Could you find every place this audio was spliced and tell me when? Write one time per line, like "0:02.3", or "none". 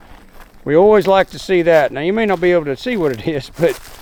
none